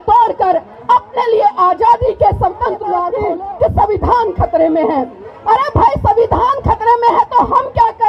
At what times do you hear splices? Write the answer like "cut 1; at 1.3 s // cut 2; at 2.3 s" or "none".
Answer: cut 1; at 3.1 s